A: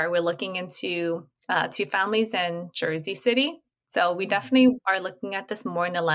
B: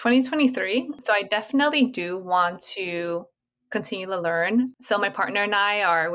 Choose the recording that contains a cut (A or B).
B